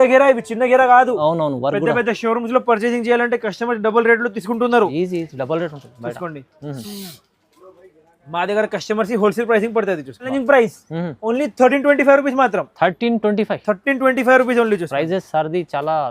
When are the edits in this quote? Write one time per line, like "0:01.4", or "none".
0:10.3

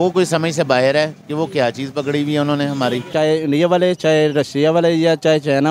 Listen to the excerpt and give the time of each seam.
0:03.1

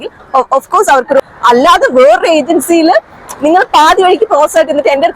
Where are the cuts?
0:01.2

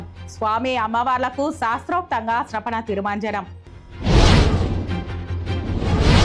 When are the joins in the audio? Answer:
none

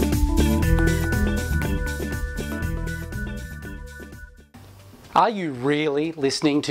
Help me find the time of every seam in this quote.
none

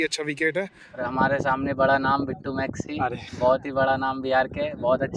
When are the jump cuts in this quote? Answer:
0:01.0

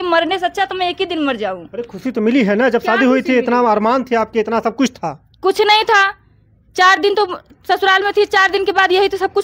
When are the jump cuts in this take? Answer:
none

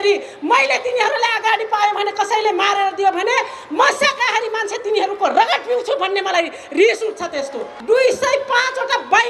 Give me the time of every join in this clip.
0:07.7

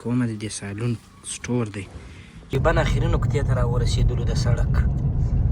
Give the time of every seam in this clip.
0:02.5

